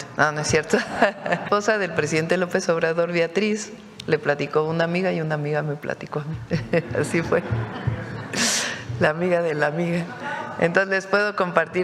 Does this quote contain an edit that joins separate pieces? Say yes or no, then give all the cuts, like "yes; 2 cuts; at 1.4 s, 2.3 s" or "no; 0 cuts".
yes; 1 cut; at 1.4 s